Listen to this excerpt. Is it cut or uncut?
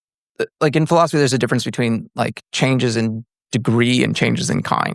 uncut